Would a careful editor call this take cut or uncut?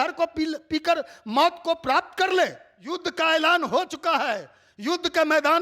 cut